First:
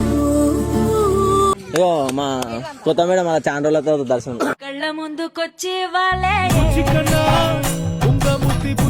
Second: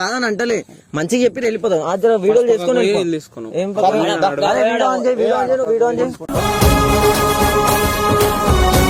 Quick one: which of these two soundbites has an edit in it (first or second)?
first